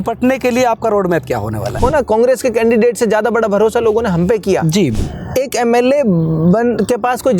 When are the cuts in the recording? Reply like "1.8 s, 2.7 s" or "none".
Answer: 1.8 s, 5.0 s